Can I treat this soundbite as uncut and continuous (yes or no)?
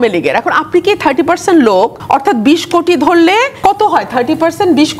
no